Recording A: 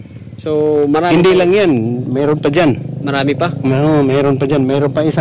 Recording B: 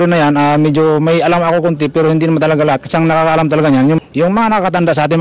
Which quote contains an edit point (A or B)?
B